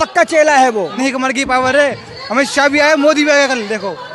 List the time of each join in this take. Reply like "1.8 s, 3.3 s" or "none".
0.9 s